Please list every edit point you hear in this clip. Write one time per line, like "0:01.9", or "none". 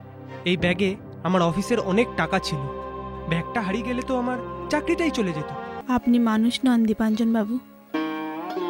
0:05.7